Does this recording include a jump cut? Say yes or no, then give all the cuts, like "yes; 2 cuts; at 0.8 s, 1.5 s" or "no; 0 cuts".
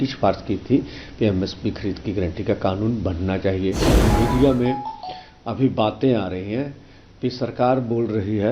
yes; 1 cut; at 4.0 s